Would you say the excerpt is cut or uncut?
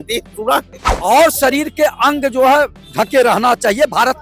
cut